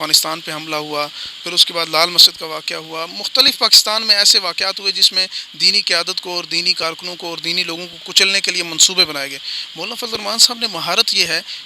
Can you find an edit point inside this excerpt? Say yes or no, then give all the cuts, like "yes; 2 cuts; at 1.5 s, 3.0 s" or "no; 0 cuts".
no; 0 cuts